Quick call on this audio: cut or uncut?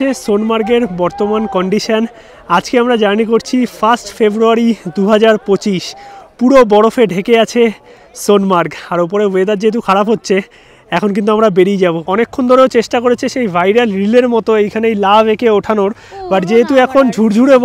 uncut